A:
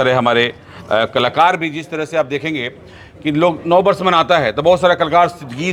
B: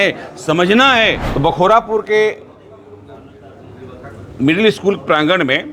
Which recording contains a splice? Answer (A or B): B